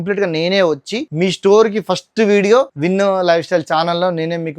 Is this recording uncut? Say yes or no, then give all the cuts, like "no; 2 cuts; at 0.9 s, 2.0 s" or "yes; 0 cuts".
no; 2 cuts; at 1.0 s, 2.8 s